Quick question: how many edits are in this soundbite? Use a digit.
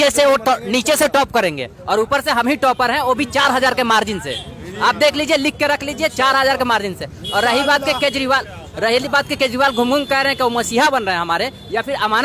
0